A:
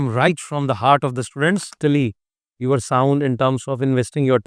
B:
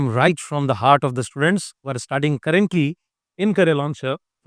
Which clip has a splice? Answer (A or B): A